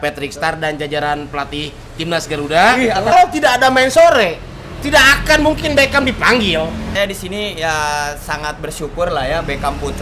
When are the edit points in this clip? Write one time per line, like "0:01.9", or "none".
0:03.1
0:06.9